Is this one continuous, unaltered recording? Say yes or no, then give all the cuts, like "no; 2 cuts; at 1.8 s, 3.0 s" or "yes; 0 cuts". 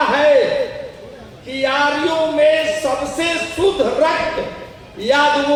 yes; 0 cuts